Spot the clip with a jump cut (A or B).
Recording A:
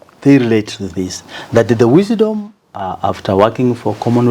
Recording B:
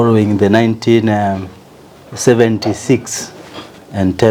A